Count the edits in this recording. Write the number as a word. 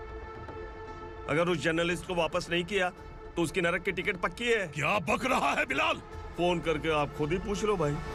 zero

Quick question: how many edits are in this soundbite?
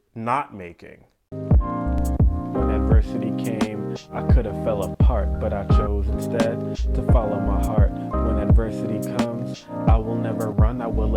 one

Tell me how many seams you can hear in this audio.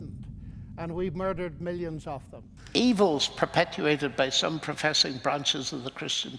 one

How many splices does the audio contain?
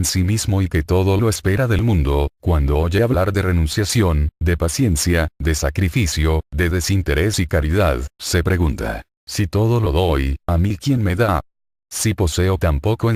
zero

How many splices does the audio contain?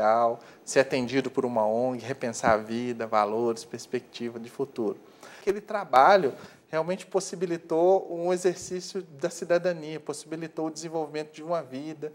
one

